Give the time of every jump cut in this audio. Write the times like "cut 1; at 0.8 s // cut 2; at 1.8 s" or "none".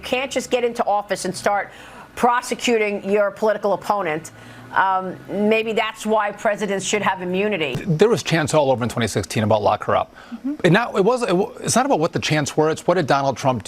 cut 1; at 7.8 s